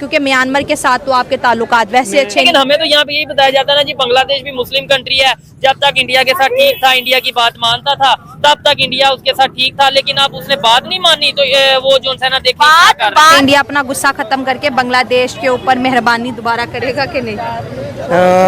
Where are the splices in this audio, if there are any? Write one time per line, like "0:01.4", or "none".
0:02.5
0:13.2

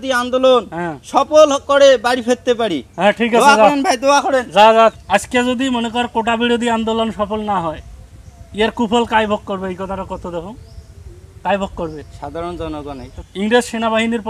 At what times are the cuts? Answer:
0:05.0
0:13.1

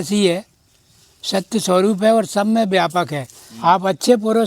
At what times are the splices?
0:03.4

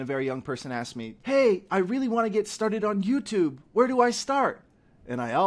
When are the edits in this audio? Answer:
0:01.1

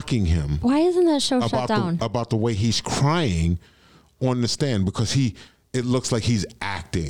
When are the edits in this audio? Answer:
none

